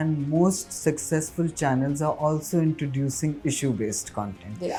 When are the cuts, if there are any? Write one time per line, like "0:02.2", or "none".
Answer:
none